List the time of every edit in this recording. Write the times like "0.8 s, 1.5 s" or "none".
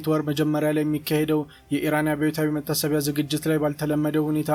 none

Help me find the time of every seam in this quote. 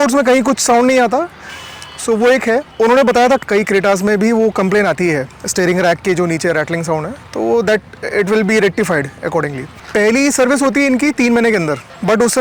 none

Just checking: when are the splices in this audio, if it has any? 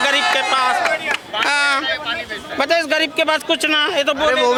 none

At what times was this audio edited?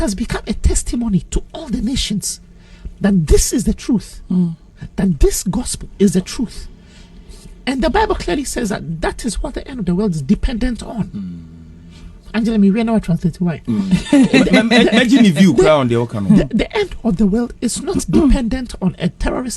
10.2 s

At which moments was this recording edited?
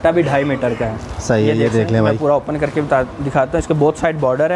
none

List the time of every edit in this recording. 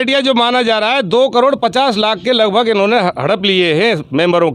none

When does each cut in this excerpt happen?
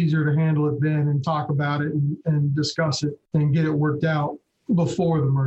3.2 s, 4.5 s

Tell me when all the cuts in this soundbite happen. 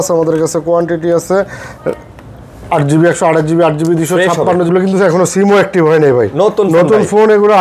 4.7 s

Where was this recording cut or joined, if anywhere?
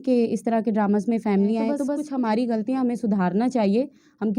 2.0 s

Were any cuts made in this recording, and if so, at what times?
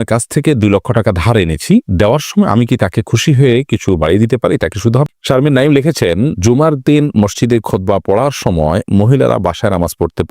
5.1 s

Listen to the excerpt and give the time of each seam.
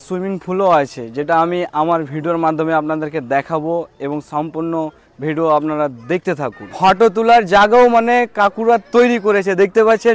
6.6 s

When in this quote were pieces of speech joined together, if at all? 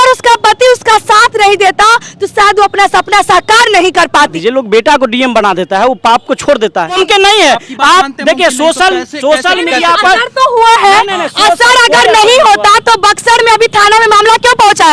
4.3 s, 7.0 s

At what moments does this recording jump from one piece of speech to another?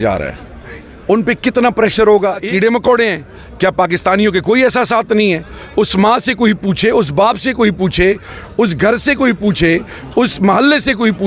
2.4 s

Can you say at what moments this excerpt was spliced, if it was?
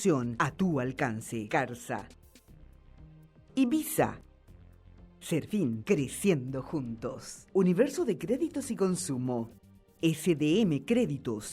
2.2 s, 3.5 s

